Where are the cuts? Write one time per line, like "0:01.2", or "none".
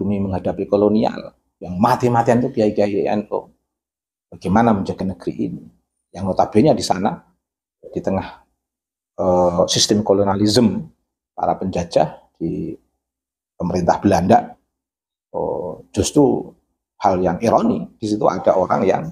none